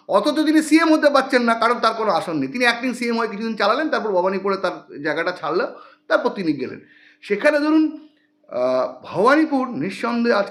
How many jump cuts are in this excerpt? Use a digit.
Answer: 0